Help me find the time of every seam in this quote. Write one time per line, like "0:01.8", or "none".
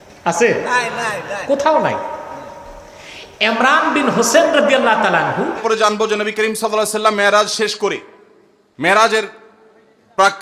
0:05.5